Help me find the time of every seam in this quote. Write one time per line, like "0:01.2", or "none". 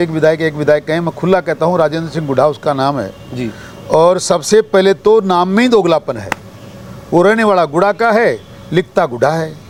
none